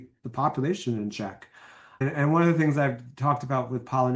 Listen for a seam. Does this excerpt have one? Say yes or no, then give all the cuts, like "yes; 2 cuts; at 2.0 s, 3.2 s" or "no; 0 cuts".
yes; 1 cut; at 2.0 s